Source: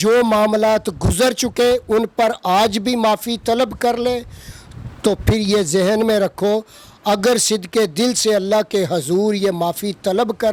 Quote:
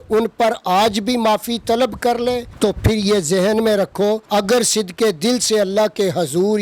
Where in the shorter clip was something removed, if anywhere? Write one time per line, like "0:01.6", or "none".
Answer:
0:02.5
0:04.2